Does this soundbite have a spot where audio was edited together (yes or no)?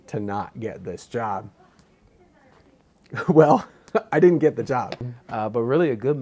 yes